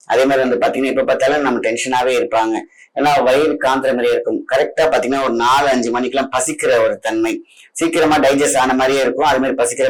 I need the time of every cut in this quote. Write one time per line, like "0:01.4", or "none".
none

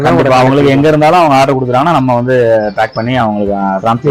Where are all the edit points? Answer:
none

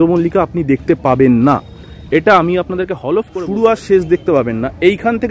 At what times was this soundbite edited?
0:03.3

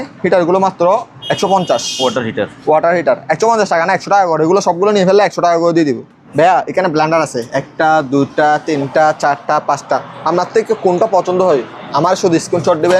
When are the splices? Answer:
0:06.2

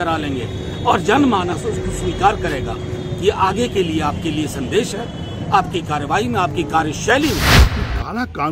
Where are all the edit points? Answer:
0:07.6

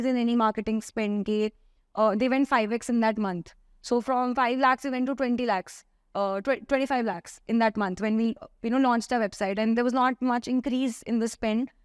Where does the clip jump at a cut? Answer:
none

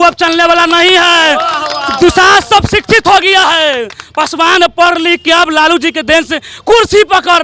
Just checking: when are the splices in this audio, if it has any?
none

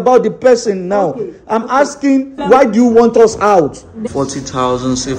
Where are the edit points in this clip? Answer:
0:02.4
0:04.1

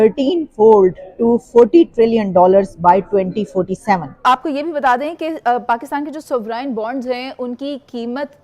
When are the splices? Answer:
0:04.2

